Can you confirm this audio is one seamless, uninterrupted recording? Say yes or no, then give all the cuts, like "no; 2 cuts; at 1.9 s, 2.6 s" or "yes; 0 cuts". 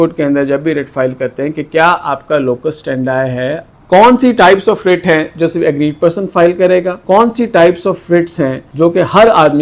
no; 3 cuts; at 3.7 s, 6.9 s, 8.6 s